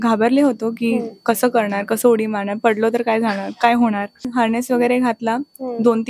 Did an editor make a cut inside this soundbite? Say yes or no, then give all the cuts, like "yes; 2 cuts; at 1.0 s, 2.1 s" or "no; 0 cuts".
yes; 1 cut; at 4.3 s